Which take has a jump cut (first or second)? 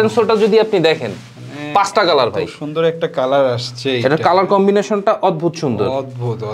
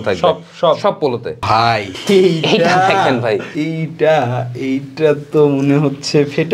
second